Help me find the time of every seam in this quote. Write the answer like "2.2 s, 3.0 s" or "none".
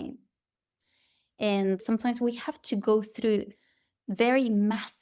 1.8 s